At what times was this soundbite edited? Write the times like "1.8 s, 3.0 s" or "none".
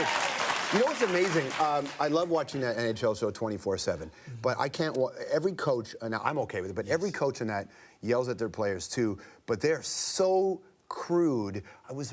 3.8 s